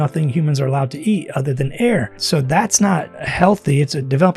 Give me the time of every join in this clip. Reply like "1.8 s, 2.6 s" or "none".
2.2 s, 3.2 s